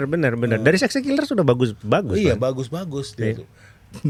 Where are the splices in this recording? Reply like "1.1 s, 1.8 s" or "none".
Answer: none